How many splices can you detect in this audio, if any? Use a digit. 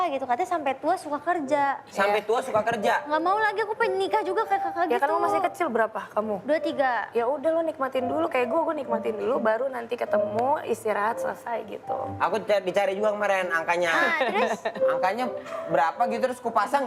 0